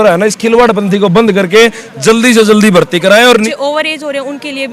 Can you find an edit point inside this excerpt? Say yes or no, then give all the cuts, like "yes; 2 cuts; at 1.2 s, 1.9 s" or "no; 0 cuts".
yes; 1 cut; at 3.5 s